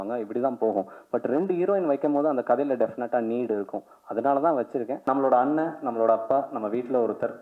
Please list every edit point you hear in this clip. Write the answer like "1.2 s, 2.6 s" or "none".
4.9 s